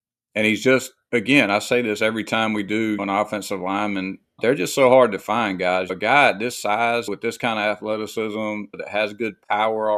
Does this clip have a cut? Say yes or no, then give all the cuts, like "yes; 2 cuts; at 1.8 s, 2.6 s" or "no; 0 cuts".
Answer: yes; 5 cuts; at 3.0 s, 4.4 s, 5.9 s, 7.1 s, 8.8 s